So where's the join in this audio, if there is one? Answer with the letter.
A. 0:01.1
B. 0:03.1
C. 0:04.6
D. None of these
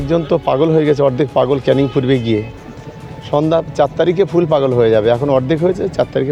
D